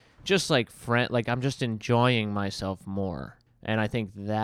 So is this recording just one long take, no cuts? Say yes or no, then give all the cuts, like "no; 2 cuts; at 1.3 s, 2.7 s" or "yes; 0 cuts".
no; 1 cut; at 3.4 s